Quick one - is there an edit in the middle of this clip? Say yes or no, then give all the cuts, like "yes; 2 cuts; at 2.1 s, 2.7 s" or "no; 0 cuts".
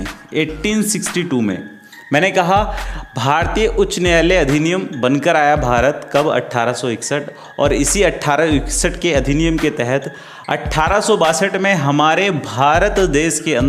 no; 0 cuts